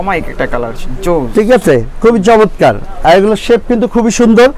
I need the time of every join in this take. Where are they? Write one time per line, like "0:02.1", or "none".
none